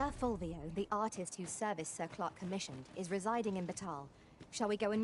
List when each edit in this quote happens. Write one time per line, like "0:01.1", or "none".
none